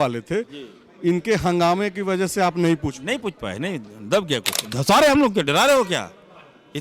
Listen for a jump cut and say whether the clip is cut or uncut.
cut